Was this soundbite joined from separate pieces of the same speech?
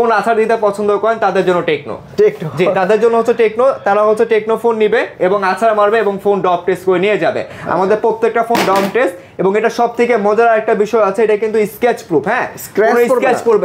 no; 0 cuts

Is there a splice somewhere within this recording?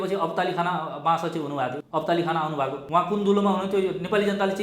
yes; 2 cuts; at 1.8 s, 2.8 s

